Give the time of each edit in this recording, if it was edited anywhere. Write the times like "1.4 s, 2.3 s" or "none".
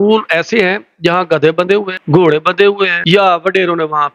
2.0 s, 3.0 s